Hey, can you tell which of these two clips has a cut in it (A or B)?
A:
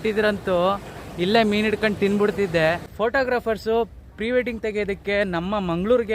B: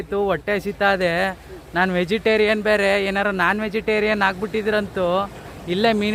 A